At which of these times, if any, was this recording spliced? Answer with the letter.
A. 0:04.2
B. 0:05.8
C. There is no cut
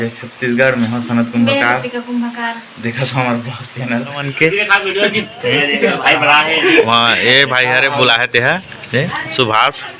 A